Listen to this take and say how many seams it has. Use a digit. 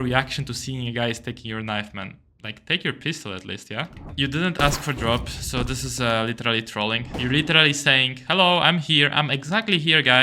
2